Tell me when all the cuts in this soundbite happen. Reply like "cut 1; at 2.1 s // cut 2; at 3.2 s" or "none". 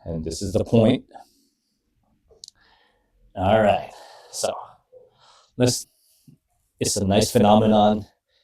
cut 1; at 5.8 s